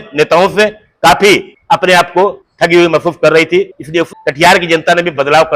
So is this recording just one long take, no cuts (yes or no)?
no